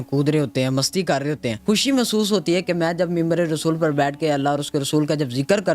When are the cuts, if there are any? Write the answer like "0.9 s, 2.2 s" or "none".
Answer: 1.6 s